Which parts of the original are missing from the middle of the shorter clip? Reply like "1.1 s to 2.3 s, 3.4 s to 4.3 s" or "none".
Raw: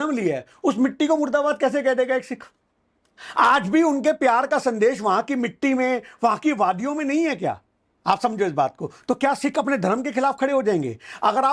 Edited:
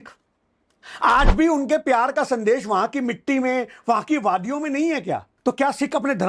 7.6 s to 8.9 s